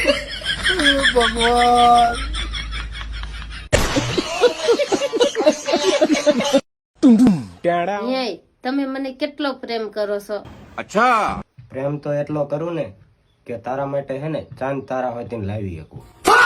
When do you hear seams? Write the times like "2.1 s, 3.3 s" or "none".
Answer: 6.8 s, 8.0 s